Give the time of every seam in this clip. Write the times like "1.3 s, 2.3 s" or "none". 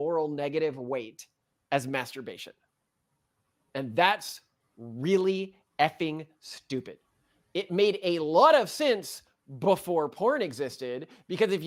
none